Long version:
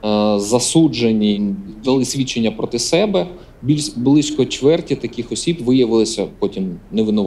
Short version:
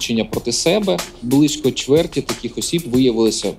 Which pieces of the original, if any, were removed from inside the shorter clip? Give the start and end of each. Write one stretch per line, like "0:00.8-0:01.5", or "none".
0:03.4-0:03.9